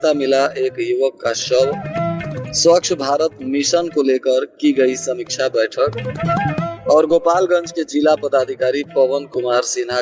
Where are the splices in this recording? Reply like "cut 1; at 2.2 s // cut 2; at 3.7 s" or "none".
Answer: none